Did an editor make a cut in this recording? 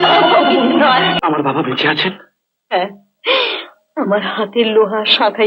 yes; 1 cut; at 1.1 s

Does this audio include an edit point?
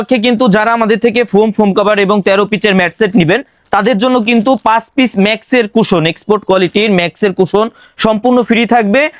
no; 0 cuts

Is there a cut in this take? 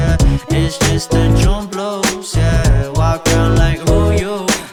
no; 0 cuts

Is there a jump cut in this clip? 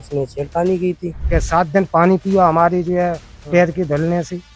yes; 1 cut; at 1.1 s

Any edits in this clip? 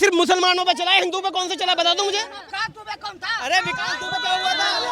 yes; 1 cut; at 2.5 s

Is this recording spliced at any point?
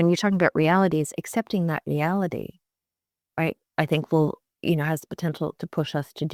no; 0 cuts

